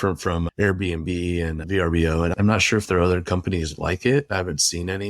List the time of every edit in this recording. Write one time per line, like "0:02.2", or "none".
0:02.3